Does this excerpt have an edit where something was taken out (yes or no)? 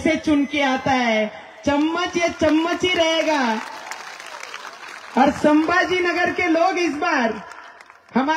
no